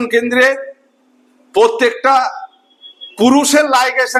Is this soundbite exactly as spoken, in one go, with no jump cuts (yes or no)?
yes